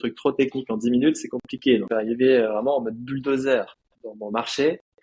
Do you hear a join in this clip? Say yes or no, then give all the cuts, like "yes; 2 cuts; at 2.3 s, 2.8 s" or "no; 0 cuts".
yes; 1 cut; at 1.9 s